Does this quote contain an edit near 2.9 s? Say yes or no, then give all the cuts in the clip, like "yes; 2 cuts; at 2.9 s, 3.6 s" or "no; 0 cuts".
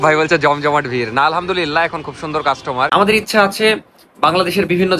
yes; 1 cut; at 2.9 s